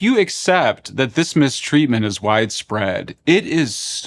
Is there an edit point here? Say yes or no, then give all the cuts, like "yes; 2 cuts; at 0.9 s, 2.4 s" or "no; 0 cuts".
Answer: no; 0 cuts